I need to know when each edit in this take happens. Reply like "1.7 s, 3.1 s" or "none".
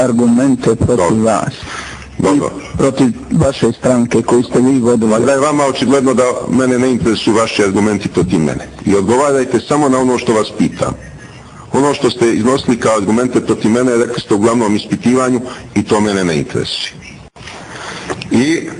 none